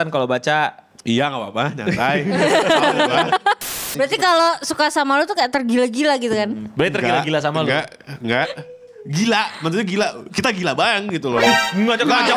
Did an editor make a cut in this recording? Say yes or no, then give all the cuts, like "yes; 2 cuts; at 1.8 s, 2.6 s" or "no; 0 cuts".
yes; 1 cut; at 3.7 s